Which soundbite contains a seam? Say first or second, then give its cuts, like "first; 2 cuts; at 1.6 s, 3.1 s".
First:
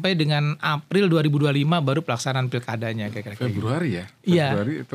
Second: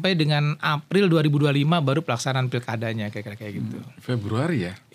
first; 1 cut; at 3.3 s